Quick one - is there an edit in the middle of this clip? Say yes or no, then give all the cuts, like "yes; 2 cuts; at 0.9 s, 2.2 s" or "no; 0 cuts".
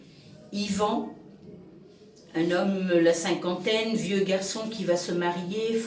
no; 0 cuts